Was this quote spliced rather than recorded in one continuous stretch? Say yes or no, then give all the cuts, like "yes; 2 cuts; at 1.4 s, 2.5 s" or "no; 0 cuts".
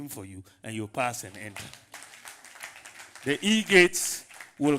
no; 0 cuts